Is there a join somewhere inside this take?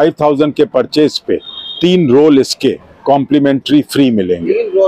no; 0 cuts

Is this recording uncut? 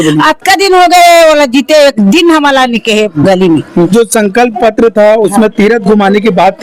no; 1 cut; at 3.9 s

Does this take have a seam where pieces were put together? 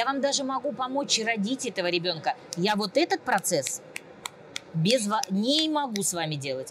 no; 0 cuts

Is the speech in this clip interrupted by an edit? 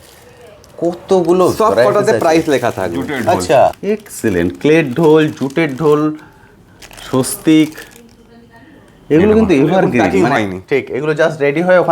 yes; 2 cuts; at 3.8 s, 10.2 s

